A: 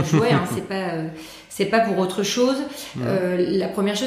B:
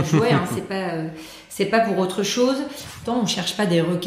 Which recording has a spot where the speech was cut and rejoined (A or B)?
B